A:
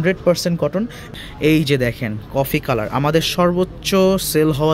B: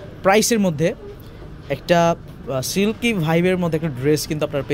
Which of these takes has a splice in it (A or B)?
A